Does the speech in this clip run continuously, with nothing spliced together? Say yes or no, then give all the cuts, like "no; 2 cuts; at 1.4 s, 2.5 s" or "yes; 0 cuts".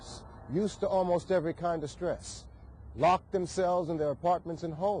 yes; 0 cuts